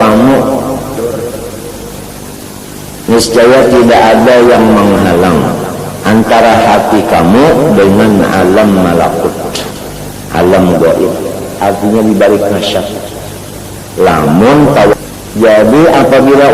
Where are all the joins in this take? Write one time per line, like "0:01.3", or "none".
0:01.0
0:14.9